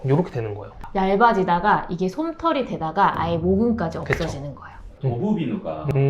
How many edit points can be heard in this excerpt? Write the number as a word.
one